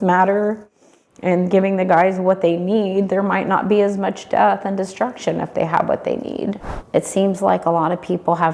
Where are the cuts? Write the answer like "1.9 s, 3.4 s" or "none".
6.7 s